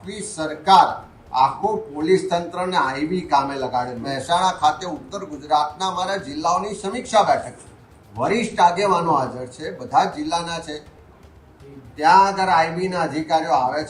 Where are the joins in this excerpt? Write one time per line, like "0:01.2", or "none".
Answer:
0:04.1